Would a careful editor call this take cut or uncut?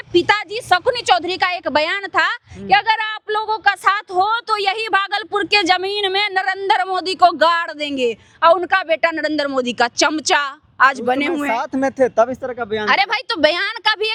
uncut